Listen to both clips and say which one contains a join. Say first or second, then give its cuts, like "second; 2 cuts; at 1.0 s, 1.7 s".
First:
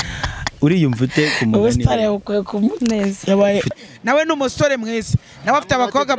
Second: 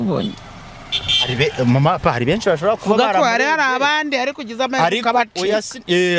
first; 1 cut; at 3.7 s